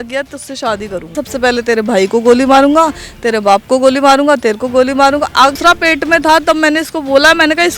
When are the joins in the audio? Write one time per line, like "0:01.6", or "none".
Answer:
0:01.2
0:05.5